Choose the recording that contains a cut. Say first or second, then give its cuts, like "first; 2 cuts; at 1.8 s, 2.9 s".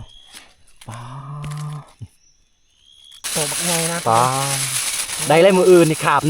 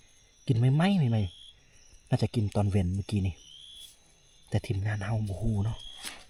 first; 1 cut; at 3.1 s